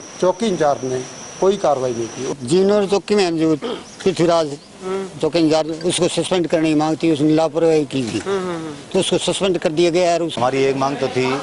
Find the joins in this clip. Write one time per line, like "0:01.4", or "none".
0:02.3
0:10.3